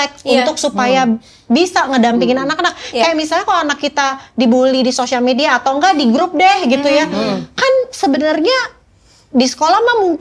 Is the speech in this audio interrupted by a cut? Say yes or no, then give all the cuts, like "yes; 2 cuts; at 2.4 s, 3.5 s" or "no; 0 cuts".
no; 0 cuts